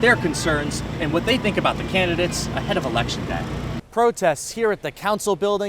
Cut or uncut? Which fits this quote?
cut